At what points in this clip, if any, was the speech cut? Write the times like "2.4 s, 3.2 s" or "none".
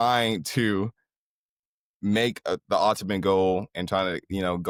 none